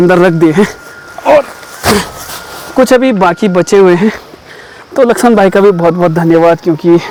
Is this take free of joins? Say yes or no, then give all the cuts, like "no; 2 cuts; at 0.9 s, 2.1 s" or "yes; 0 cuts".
yes; 0 cuts